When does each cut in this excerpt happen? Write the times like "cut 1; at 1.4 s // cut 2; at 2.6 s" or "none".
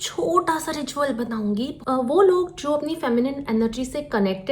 cut 1; at 1.8 s